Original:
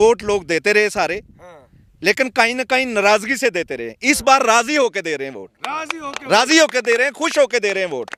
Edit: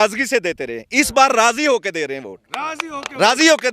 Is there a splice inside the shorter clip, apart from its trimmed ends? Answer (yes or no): no